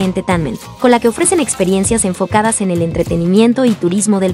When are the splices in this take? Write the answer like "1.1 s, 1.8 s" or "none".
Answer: none